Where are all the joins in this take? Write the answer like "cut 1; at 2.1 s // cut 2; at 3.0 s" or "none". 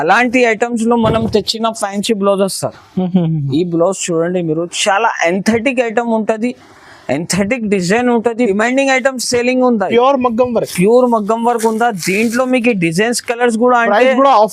cut 1; at 8.5 s